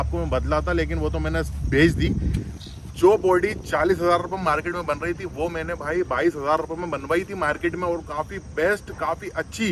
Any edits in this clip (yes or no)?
no